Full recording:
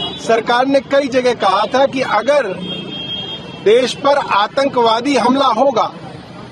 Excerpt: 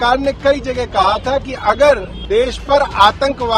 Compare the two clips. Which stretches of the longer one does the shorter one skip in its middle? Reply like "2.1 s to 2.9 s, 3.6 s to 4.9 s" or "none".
2.6 s to 3.5 s